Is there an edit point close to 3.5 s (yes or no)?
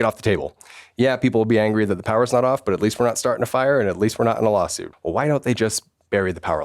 no